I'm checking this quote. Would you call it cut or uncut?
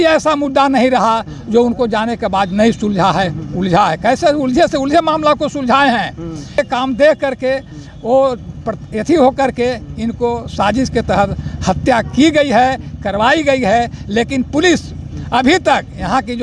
cut